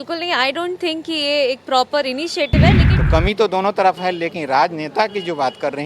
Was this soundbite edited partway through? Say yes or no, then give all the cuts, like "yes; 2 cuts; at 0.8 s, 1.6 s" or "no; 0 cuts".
yes; 1 cut; at 2.9 s